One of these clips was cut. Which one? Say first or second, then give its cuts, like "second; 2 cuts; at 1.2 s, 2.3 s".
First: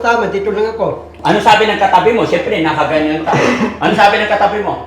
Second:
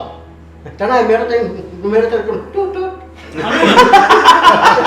first; 1 cut; at 1.1 s